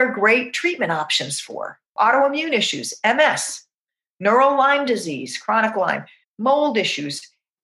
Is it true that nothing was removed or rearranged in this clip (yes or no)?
no